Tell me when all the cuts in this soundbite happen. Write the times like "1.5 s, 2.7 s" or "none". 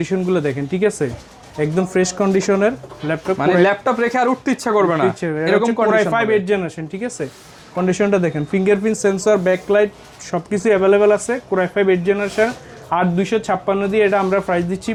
none